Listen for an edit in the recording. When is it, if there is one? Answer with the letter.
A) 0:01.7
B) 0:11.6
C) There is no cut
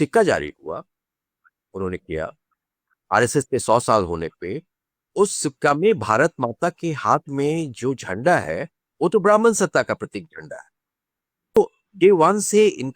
B